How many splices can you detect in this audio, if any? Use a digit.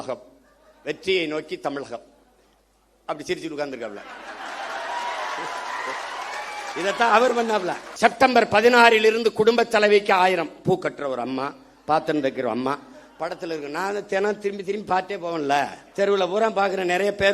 2